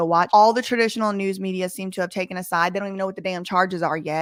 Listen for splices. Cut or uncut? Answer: uncut